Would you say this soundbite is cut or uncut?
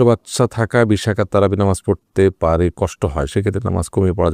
uncut